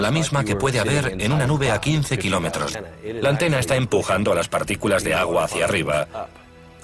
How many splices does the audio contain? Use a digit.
0